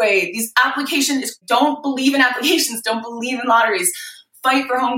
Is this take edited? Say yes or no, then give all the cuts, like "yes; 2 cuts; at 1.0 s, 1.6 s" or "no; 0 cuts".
no; 0 cuts